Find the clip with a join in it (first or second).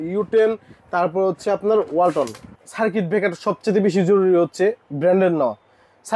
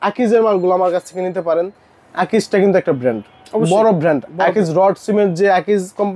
first